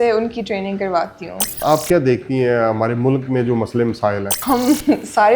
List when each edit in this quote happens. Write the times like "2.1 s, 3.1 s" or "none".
1.6 s, 4.3 s

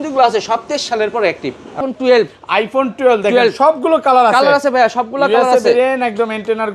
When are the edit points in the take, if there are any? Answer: 1.8 s

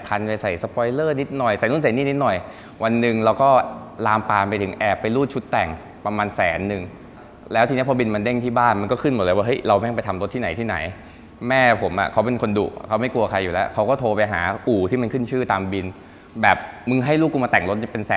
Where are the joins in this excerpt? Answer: none

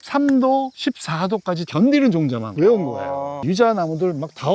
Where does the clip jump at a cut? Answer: 1.7 s, 3.3 s

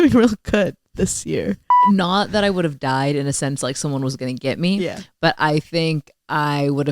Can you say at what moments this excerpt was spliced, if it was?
1.7 s

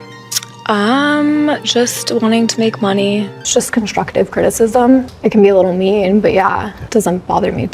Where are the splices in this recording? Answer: 3.3 s, 5.1 s, 6.8 s

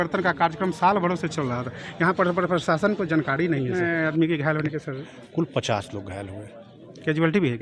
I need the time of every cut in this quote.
3.8 s

